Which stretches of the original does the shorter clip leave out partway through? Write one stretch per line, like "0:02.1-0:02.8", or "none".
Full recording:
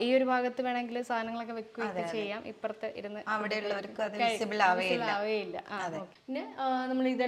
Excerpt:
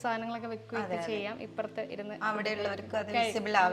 none